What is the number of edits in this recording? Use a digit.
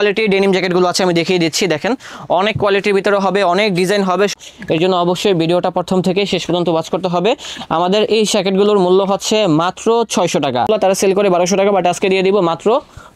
2